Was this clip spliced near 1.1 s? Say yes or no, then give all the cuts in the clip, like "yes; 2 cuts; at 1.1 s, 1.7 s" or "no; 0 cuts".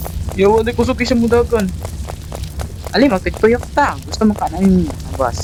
no; 0 cuts